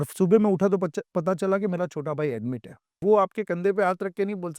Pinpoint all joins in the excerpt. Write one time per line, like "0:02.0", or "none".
0:03.0